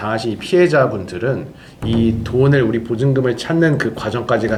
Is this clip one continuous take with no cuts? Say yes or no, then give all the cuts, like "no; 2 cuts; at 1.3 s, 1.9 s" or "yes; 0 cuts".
yes; 0 cuts